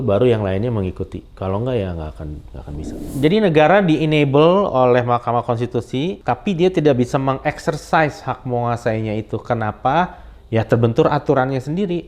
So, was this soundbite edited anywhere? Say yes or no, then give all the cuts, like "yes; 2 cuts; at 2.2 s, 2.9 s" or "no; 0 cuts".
yes; 2 cuts; at 3.0 s, 6.2 s